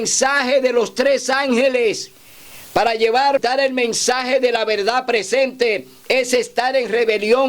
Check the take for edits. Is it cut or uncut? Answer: cut